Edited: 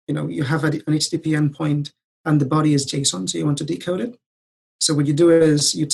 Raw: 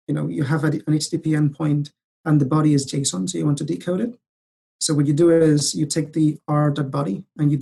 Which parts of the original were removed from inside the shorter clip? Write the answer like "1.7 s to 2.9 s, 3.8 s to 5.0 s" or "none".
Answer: none